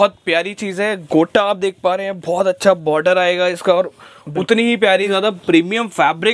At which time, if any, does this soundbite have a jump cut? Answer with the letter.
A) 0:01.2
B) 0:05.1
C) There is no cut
B